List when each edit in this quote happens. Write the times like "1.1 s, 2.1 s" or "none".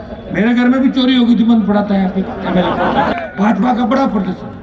3.1 s